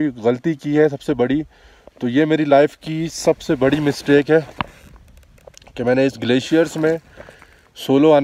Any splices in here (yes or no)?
no